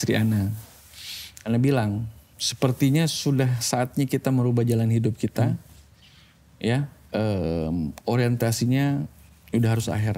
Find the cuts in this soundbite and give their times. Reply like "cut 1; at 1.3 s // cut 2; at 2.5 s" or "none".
cut 1; at 2.4 s